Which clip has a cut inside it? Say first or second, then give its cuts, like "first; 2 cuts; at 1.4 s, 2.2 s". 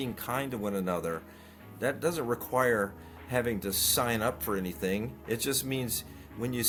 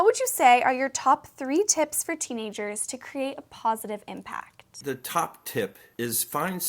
second; 2 cuts; at 4.8 s, 5.8 s